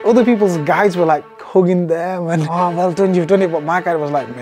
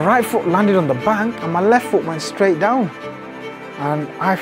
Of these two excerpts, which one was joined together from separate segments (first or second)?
first